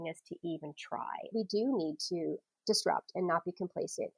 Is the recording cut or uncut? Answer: cut